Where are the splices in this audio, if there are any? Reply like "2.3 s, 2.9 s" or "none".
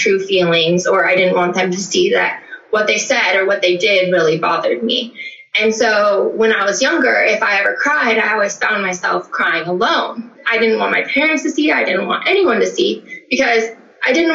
10.4 s